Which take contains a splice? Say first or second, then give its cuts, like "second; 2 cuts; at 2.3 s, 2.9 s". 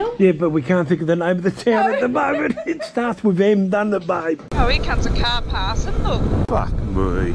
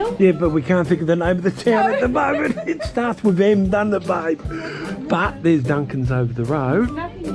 first; 2 cuts; at 4.5 s, 6.5 s